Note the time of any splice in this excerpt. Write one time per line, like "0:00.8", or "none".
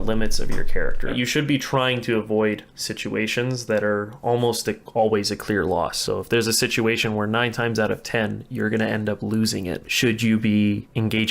0:01.1